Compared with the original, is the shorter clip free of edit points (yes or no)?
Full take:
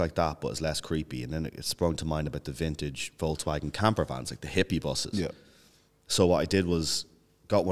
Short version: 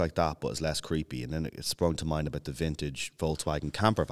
yes